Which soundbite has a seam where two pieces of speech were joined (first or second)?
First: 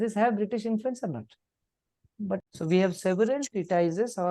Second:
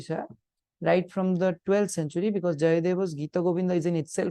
first